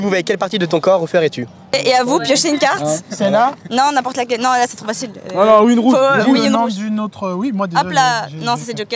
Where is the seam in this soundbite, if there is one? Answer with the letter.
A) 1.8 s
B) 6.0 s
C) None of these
A